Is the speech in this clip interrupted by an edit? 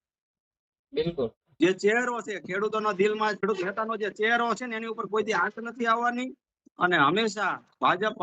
yes; 1 cut; at 3.4 s

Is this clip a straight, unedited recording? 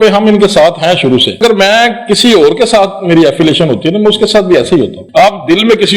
no; 2 cuts; at 1.4 s, 5.0 s

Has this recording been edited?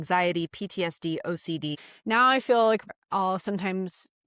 yes; 2 cuts; at 1.8 s, 2.9 s

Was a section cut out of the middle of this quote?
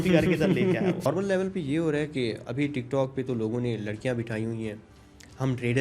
yes; 1 cut; at 1.0 s

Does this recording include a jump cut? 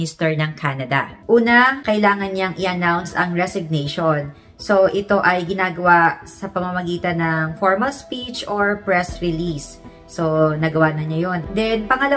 no; 0 cuts

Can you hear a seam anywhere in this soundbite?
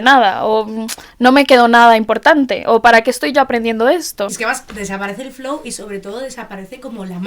yes; 1 cut; at 4.4 s

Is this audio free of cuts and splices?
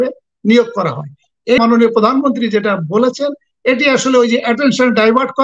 no; 1 cut; at 1.6 s

